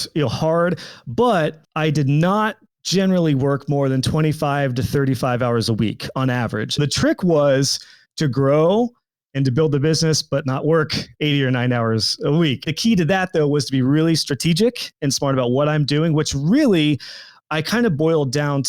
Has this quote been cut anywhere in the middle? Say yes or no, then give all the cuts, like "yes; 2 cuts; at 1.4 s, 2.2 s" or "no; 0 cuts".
yes; 3 cuts; at 1.6 s, 6.8 s, 12.6 s